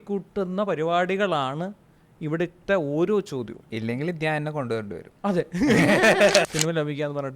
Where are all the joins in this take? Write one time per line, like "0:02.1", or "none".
0:03.6
0:05.0
0:06.5